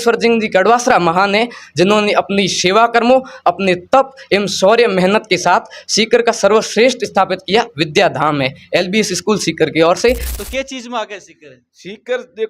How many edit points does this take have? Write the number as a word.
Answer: one